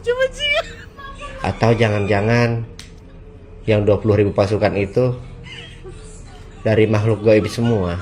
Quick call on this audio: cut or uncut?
uncut